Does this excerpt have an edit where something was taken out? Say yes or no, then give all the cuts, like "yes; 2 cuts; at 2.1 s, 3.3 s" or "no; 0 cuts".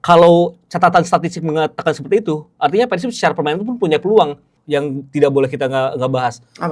yes; 1 cut; at 4.5 s